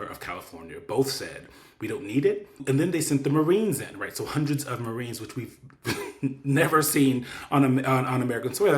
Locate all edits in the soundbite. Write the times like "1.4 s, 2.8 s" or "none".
2.6 s